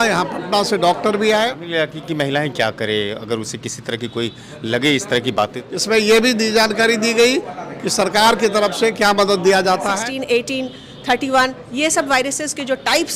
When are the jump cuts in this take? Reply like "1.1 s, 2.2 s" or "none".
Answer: 1.6 s, 5.7 s, 10.0 s

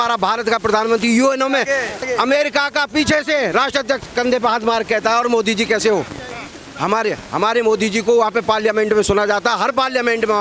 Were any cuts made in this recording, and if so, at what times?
2.1 s

